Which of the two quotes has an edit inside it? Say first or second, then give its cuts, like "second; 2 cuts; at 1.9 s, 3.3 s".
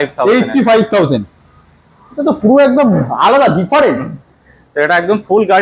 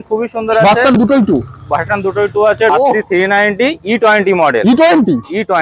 second; 1 cut; at 2.7 s